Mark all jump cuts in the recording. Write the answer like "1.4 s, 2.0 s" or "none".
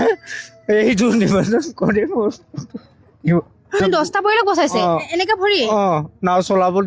3.8 s